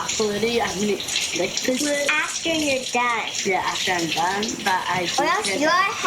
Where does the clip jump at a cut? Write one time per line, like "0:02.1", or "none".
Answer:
none